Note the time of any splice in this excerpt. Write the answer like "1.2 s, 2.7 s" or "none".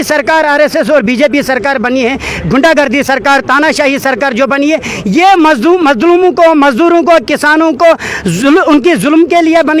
none